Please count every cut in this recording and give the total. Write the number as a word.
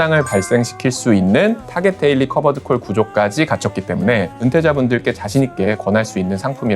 two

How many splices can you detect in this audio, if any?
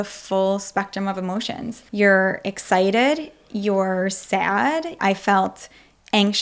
two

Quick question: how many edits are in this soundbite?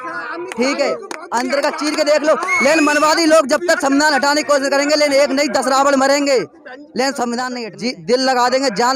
one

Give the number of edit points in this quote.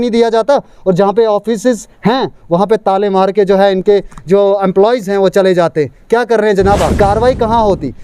one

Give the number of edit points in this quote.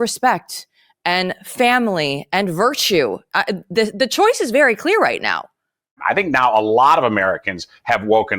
one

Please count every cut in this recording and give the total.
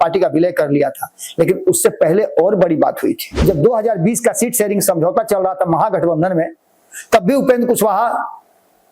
one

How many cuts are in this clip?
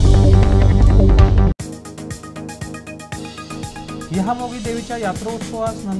zero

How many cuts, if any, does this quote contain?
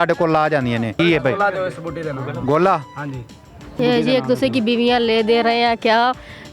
two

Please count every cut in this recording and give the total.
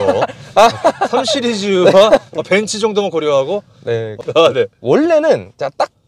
one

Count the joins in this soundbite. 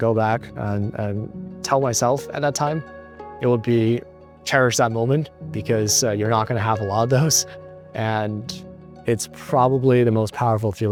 zero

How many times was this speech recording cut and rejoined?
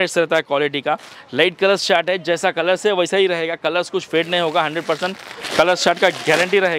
one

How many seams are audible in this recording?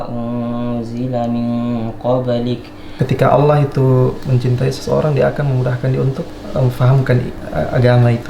three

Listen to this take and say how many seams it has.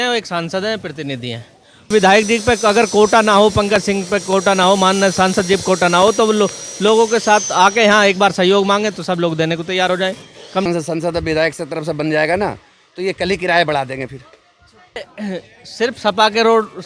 three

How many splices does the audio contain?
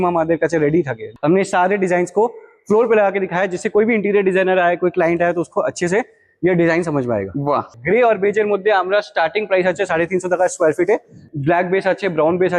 three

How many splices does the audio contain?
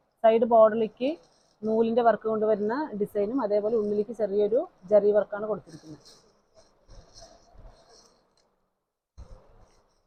zero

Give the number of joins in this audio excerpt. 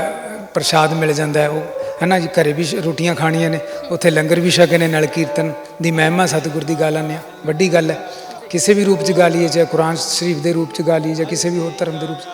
zero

